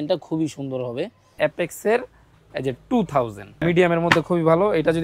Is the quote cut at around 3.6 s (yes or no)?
yes